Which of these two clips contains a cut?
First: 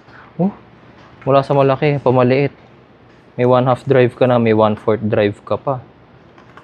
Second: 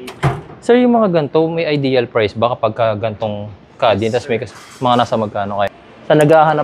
second; 1 cut; at 5.7 s

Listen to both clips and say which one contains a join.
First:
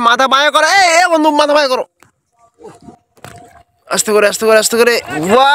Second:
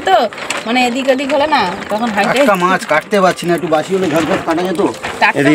first; 1 cut; at 3.0 s

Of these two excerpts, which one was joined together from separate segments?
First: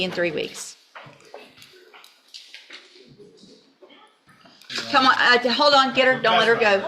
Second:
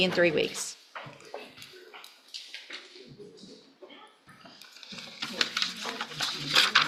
first; 1 cut; at 4.7 s

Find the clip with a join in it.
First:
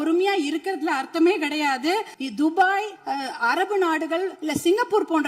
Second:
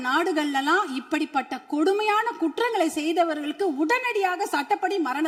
first; 3 cuts; at 2.2 s, 3.0 s, 4.4 s

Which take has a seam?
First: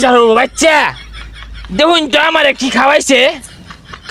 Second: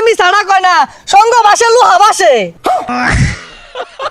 second; 1 cut; at 2.9 s

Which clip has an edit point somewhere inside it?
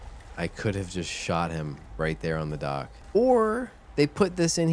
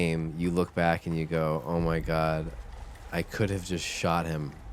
first; 2 cuts; at 3.0 s, 3.8 s

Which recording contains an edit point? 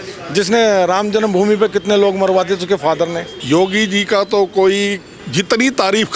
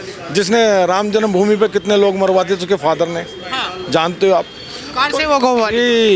first; 2 cuts; at 3.3 s, 5.1 s

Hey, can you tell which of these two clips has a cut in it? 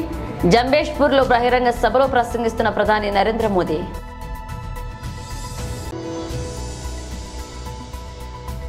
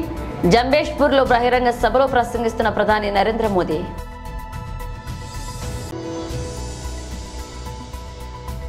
second; 3 cuts; at 4.0 s, 5.5 s, 7.6 s

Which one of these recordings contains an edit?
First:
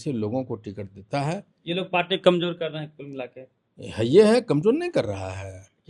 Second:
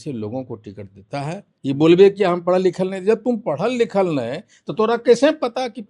second; 1 cut; at 1.5 s

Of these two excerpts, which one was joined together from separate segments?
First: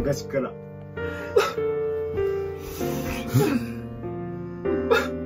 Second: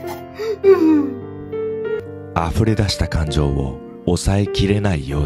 second; 1 cut; at 2.0 s

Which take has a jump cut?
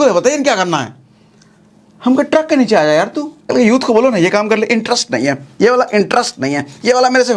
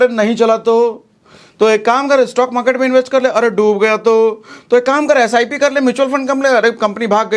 first; 1 cut; at 3.5 s

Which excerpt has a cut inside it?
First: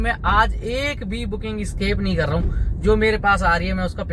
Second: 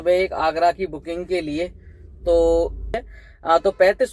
second; 1 cut; at 3.2 s

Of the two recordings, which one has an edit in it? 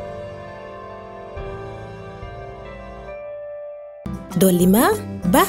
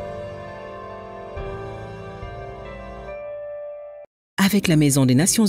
second; 1 cut; at 4.0 s

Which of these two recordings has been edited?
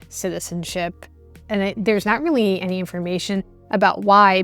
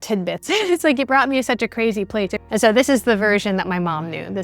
second; 1 cut; at 2.4 s

